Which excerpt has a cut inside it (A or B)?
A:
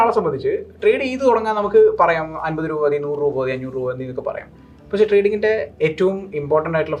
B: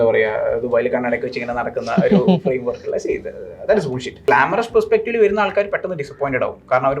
B